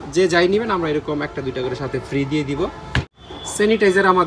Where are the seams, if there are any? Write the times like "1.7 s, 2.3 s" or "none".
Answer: 3.2 s

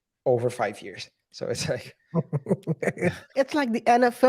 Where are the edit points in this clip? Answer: 3.3 s

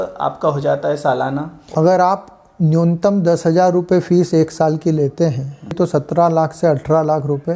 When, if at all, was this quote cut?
1.6 s, 5.7 s

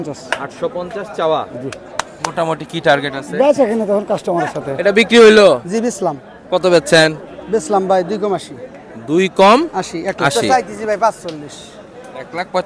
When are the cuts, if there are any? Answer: 4.7 s, 10.4 s

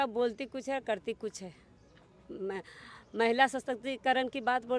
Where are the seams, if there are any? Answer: none

